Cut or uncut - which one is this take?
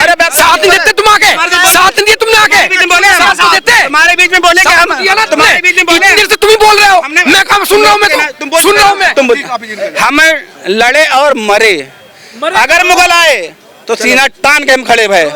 uncut